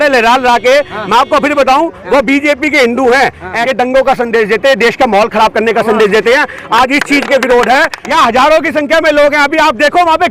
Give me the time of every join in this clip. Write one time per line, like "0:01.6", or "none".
0:03.6
0:08.0